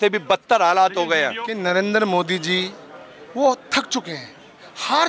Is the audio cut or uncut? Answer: cut